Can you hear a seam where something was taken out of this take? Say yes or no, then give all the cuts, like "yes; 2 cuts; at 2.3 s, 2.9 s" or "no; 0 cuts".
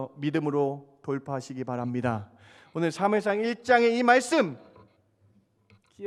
no; 0 cuts